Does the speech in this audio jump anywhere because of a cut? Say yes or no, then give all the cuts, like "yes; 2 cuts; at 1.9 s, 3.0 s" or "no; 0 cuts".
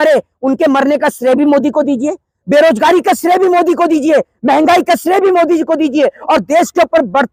no; 0 cuts